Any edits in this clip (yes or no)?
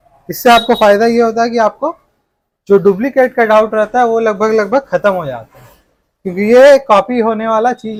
no